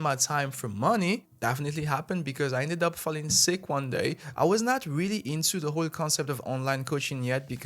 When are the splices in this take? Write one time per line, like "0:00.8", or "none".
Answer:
0:01.3
0:04.2